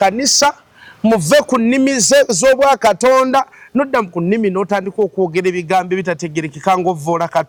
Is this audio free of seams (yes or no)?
yes